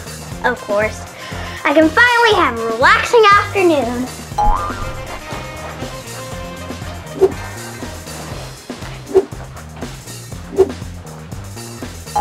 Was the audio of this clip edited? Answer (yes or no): no